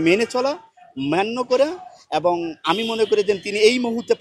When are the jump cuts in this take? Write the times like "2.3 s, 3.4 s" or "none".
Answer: none